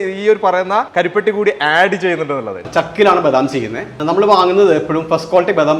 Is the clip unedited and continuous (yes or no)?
no